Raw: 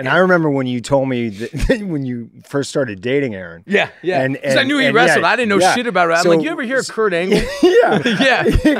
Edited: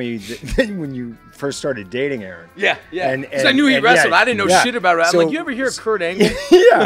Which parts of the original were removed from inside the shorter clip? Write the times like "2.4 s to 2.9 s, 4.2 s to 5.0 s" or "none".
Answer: none